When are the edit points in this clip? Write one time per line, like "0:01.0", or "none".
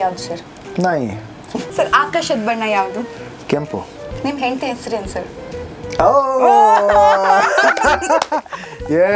0:01.7